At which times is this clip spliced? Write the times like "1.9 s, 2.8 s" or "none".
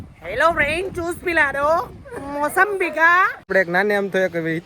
1.9 s, 3.4 s